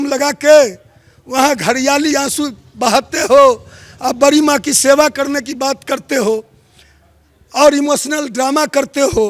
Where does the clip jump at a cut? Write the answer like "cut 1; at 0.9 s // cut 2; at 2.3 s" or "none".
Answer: none